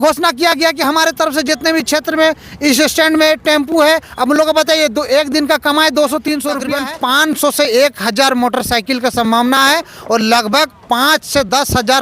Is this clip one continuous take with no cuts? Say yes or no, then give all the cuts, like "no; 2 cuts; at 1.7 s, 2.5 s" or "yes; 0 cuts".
no; 1 cut; at 6.7 s